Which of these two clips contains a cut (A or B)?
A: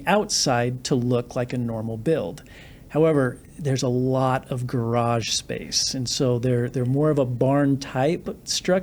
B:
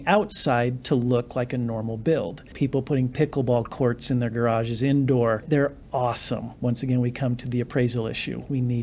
B